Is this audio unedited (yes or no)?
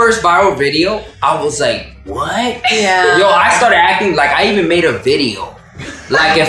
yes